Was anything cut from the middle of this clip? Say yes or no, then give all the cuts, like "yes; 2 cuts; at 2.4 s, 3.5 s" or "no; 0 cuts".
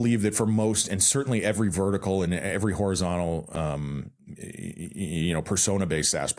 no; 0 cuts